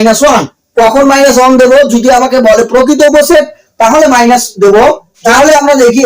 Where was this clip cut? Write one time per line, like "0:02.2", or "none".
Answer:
0:05.1